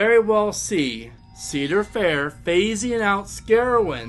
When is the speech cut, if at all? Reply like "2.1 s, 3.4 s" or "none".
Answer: none